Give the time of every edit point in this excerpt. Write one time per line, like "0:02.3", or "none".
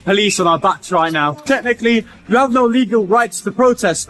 0:01.4